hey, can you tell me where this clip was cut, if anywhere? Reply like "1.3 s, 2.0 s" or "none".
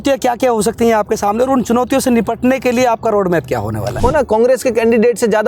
4.0 s